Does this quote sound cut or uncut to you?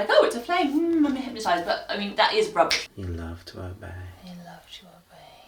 cut